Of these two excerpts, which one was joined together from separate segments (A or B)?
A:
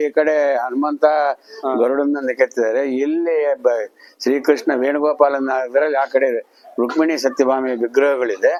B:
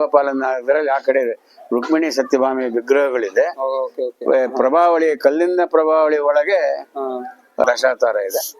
B